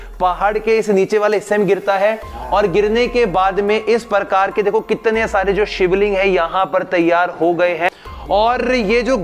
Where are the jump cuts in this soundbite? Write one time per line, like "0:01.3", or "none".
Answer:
0:07.9